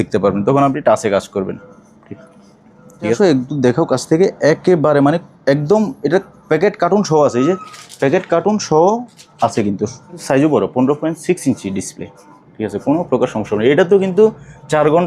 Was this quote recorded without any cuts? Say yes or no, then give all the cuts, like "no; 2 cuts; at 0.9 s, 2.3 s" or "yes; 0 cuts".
no; 2 cuts; at 3.2 s, 10.2 s